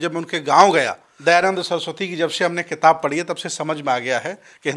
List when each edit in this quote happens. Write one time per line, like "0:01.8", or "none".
0:01.0